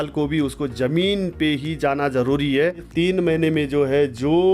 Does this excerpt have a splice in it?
yes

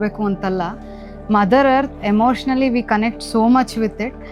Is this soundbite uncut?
yes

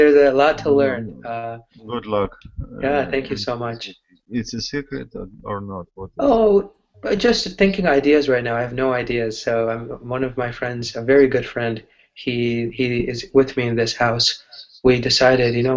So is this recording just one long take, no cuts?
no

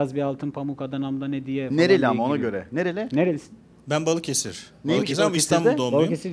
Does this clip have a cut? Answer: no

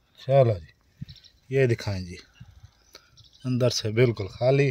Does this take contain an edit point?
no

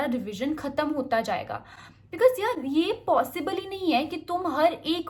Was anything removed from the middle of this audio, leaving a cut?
no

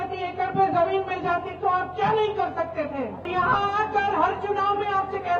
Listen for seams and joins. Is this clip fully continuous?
no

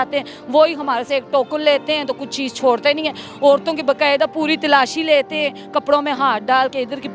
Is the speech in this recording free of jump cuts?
yes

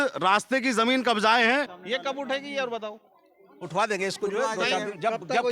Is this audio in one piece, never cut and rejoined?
no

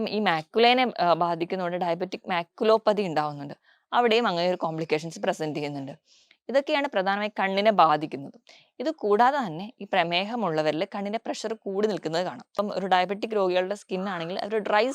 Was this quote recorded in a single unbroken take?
no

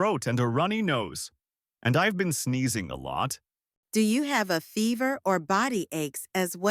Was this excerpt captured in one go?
yes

